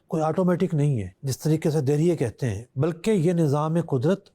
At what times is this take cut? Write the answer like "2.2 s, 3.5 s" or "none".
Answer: 1.2 s